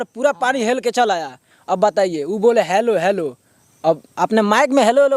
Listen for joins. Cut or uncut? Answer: uncut